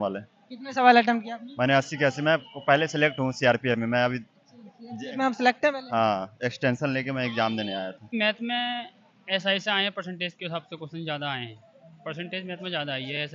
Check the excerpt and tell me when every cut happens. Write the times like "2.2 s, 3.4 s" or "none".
8.1 s